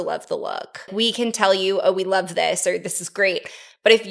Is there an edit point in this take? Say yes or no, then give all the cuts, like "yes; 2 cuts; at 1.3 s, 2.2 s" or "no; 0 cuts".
yes; 1 cut; at 0.9 s